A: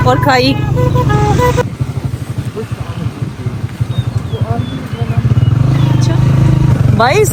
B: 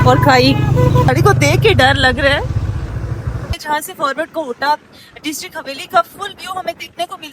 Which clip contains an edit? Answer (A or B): B